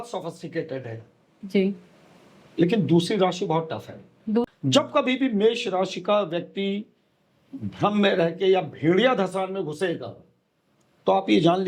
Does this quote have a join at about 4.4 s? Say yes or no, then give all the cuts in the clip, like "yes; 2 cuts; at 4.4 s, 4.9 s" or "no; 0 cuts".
yes; 1 cut; at 4.4 s